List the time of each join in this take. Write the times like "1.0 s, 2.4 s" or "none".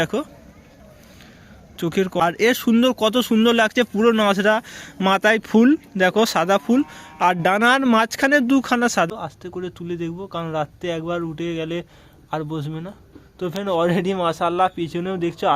2.2 s, 9.1 s